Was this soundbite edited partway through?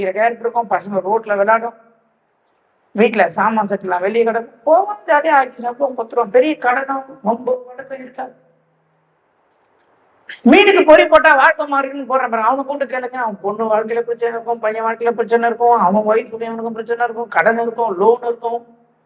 no; 0 cuts

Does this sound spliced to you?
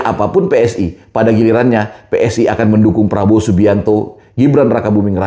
no; 0 cuts

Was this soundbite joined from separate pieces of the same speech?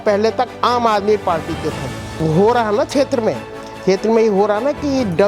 yes; 1 cut; at 2.2 s

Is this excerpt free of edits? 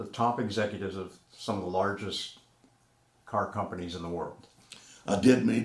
yes; 0 cuts

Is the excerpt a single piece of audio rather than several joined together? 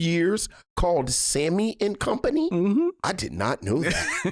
no; 1 cut; at 3.0 s

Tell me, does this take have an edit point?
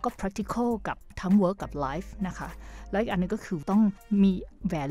yes; 1 cut; at 3.8 s

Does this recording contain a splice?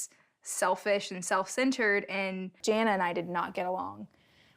yes; 1 cut; at 2.5 s

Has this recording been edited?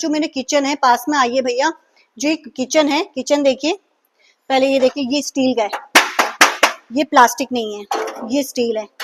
no; 0 cuts

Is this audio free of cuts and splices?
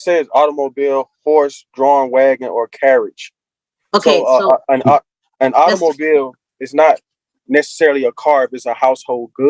yes; 0 cuts

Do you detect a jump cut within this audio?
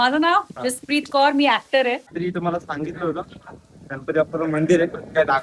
yes; 1 cut; at 2.1 s

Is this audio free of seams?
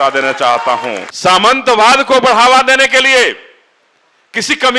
no; 1 cut; at 1.1 s

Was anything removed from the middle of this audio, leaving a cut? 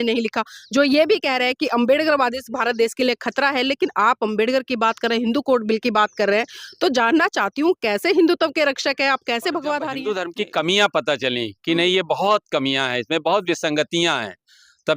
yes; 1 cut; at 10.1 s

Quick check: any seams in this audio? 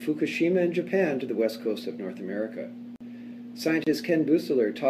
yes; 1 cut; at 2.4 s

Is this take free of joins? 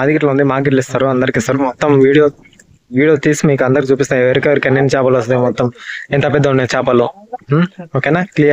yes; 0 cuts

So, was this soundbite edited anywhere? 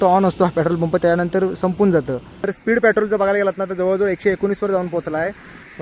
yes; 1 cut; at 2.5 s

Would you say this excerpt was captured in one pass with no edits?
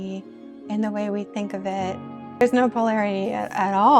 yes; 0 cuts

